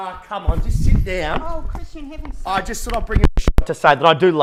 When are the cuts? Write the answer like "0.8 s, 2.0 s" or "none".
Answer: none